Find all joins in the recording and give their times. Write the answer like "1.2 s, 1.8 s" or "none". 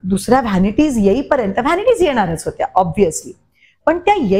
none